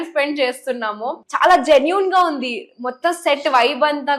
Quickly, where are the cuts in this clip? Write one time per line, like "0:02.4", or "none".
0:01.2